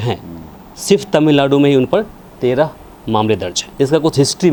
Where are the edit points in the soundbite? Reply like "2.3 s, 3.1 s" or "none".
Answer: none